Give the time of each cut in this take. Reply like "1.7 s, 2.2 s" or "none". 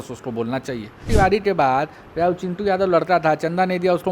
1.1 s

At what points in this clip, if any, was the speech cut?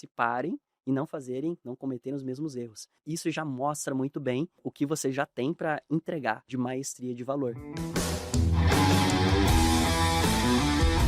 3.0 s, 4.7 s, 6.4 s, 7.7 s

